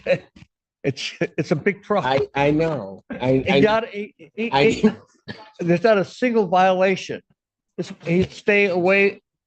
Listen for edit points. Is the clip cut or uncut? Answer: uncut